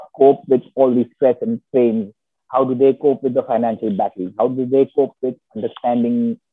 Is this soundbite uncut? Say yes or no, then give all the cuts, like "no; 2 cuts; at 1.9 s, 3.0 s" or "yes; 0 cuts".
yes; 0 cuts